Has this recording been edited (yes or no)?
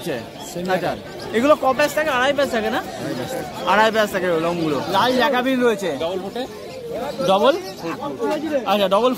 yes